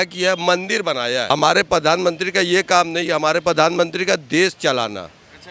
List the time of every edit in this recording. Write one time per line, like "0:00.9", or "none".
0:01.3